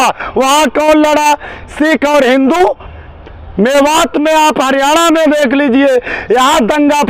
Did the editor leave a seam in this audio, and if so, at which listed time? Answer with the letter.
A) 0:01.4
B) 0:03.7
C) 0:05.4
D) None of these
D